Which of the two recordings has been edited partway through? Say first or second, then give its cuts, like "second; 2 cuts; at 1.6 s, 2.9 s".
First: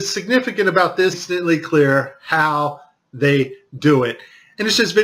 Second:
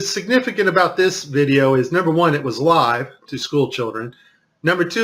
second; 1 cut; at 1.2 s